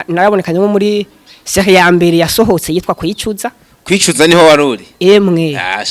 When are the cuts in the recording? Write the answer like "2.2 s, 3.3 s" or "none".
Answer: none